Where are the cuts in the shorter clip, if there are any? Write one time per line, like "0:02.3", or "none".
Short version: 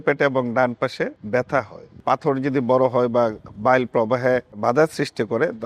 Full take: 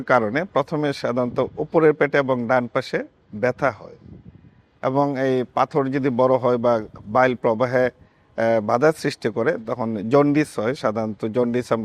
0:01.2
0:02.0
0:04.6

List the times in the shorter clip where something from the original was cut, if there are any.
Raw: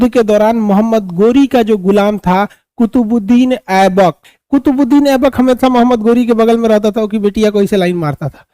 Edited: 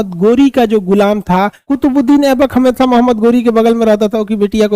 0:01.6

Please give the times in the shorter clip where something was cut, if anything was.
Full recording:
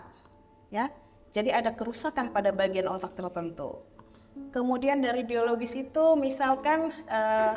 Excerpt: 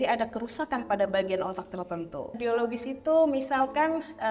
0:02.4

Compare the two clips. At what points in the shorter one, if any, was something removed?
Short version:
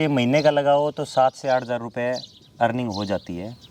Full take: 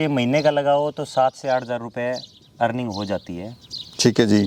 none

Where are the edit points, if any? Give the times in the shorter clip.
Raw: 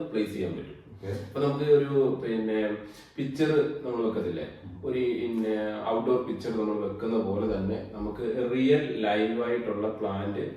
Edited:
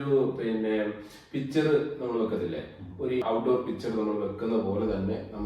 0:03.2

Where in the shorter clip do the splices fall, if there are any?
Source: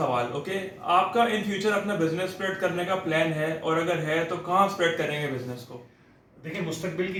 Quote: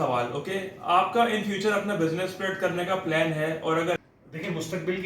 0:04.0

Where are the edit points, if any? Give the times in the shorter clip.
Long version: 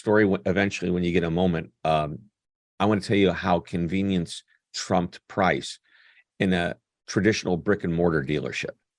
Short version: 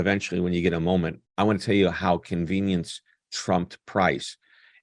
0:01.2

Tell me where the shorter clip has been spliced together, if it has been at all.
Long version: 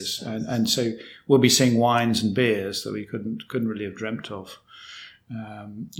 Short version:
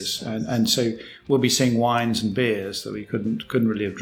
none

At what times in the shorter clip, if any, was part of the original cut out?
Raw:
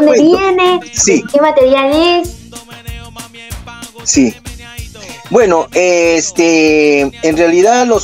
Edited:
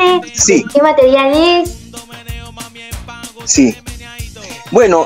none

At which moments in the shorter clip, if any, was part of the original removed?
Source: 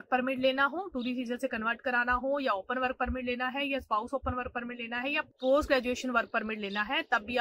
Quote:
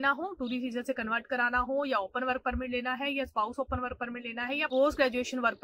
0:04.7

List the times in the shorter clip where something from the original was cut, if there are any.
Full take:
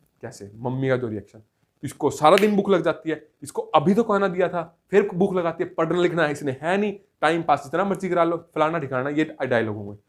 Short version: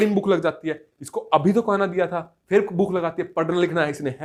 none

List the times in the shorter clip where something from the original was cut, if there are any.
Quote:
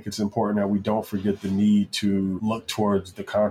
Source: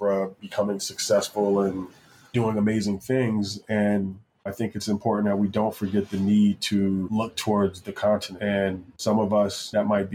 none

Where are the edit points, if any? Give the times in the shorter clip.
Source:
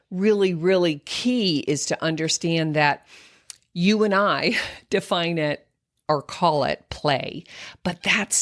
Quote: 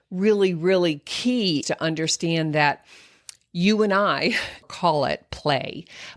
0:01.6
0:04.6

